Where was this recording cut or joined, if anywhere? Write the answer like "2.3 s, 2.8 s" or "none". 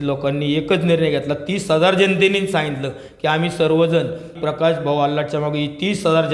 4.3 s